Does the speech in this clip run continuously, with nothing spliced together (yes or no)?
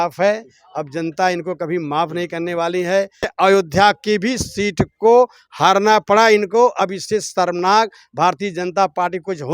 no